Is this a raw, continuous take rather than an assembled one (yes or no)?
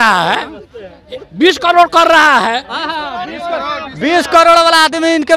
yes